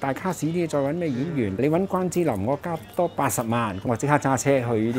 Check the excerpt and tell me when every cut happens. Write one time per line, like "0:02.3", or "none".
0:01.6
0:03.9